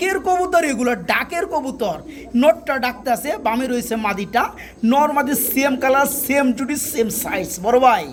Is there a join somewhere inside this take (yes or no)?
no